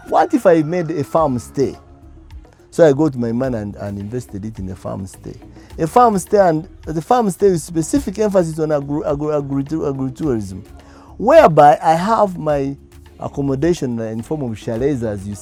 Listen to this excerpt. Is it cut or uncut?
uncut